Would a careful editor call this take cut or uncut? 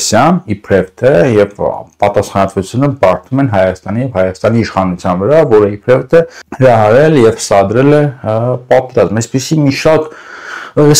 cut